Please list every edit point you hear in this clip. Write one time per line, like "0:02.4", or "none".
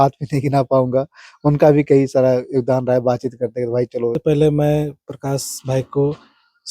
0:04.2